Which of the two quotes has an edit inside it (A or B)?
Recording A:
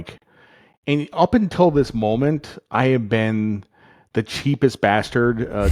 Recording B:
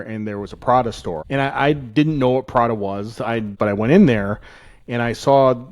B